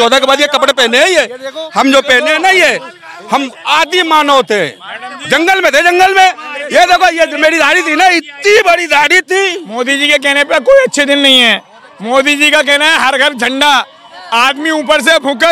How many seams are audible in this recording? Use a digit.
1